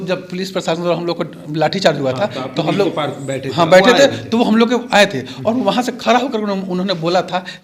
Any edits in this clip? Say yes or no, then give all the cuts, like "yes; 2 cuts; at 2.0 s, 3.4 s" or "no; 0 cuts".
no; 0 cuts